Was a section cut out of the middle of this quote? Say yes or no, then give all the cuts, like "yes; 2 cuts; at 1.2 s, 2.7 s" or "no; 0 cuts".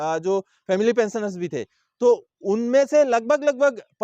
no; 0 cuts